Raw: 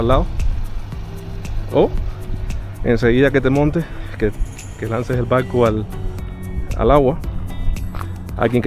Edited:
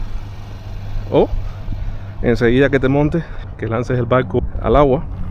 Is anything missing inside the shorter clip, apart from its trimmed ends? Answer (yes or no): yes